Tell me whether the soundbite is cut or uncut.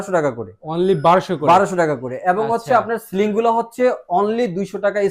uncut